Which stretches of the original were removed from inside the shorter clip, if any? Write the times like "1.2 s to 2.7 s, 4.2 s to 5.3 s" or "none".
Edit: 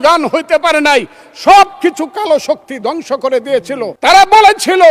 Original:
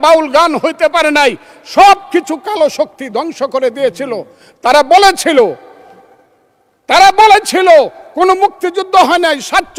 4.2 s to 6.8 s